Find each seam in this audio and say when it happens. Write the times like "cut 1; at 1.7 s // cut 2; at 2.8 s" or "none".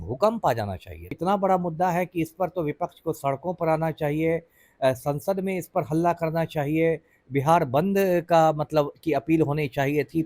cut 1; at 1.2 s